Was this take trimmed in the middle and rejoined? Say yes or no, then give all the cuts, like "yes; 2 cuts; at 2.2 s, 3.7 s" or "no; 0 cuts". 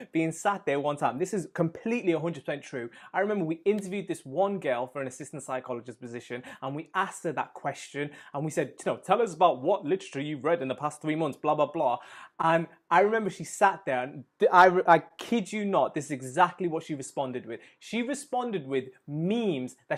no; 0 cuts